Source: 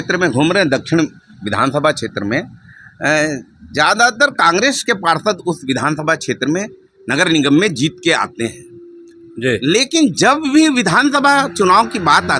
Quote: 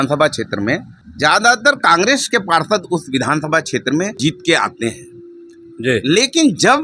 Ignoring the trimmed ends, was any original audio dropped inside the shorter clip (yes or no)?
yes